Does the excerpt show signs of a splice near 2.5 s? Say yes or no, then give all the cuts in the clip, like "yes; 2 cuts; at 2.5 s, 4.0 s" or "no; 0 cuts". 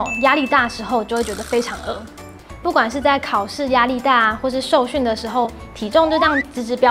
yes; 1 cut; at 2.5 s